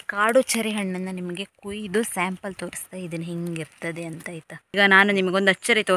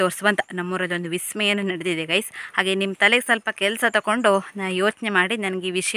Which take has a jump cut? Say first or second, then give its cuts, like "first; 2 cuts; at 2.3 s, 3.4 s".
first; 1 cut; at 4.7 s